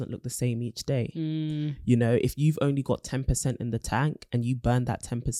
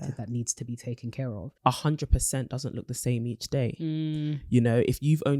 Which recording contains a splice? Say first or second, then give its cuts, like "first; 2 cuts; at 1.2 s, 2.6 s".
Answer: second; 1 cut; at 1.5 s